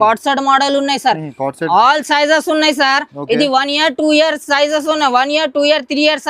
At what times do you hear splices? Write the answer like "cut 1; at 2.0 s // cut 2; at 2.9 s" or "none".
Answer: none